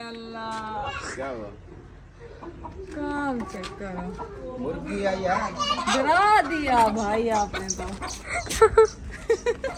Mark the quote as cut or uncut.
cut